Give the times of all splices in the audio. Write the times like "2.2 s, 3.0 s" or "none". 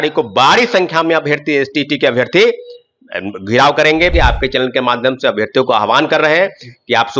4.1 s